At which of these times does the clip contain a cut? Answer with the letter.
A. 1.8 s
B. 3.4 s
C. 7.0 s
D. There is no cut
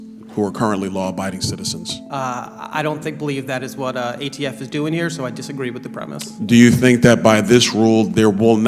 A